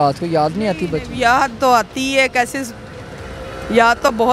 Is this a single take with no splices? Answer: yes; 0 cuts

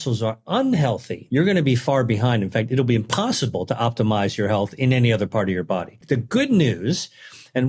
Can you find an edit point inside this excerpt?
yes; 2 cuts; at 1.1 s, 6.0 s

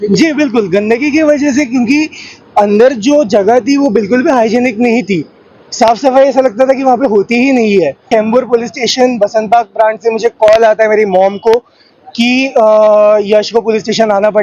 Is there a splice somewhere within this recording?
yes; 1 cut; at 8.0 s

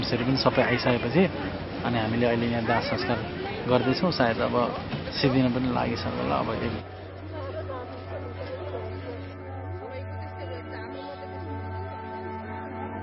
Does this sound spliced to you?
yes; 1 cut; at 12.0 s

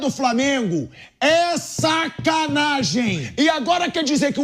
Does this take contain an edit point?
yes; 1 cut; at 3.2 s

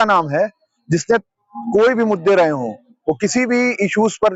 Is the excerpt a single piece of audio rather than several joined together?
yes; 0 cuts

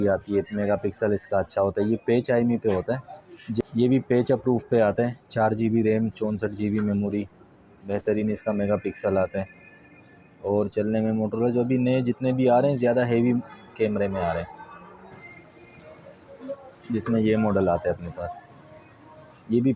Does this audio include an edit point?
yes; 2 cuts; at 3.6 s, 15.2 s

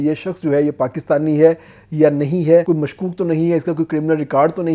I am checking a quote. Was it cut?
yes; 1 cut; at 2.6 s

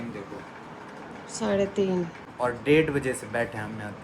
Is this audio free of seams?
no; 1 cut; at 2.2 s

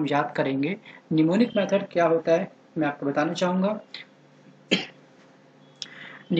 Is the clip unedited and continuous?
no; 1 cut; at 3.4 s

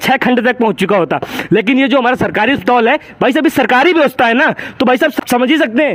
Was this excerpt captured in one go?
yes; 0 cuts

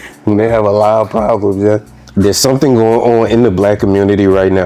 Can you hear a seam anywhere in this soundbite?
yes; 1 cut; at 2.0 s

